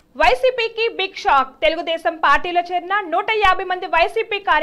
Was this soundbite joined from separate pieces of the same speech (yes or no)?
no